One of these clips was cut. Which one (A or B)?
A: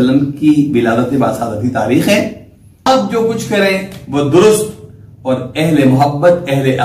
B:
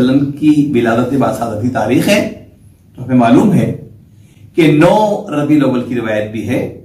A